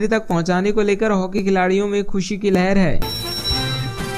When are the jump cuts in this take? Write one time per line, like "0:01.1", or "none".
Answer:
0:03.0